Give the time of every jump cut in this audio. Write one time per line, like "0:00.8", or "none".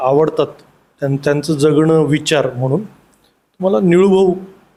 none